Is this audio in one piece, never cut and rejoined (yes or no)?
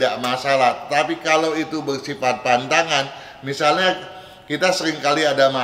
yes